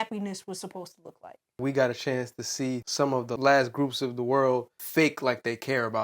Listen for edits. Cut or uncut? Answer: cut